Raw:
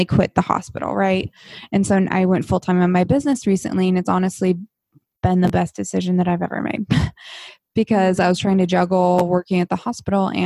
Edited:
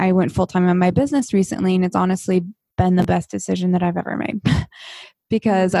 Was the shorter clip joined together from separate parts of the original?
yes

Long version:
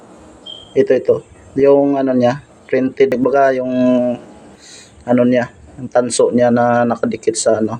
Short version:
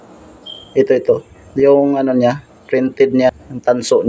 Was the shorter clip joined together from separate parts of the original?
yes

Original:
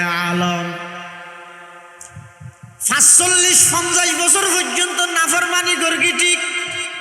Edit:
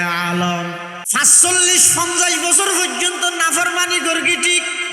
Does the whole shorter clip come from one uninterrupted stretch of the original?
no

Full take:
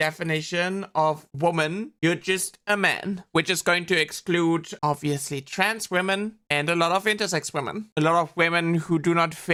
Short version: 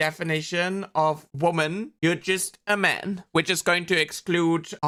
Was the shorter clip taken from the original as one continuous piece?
yes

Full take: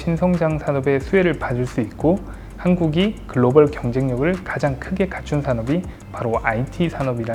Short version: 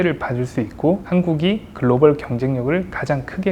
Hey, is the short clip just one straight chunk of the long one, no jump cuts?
no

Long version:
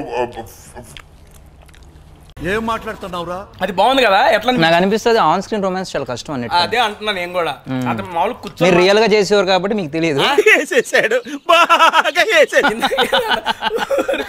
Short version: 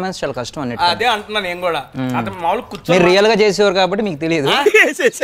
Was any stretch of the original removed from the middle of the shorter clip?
no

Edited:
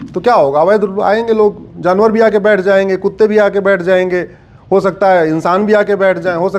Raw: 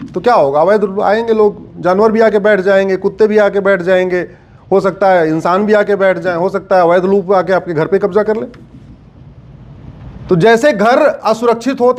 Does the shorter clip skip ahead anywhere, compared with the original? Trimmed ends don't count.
no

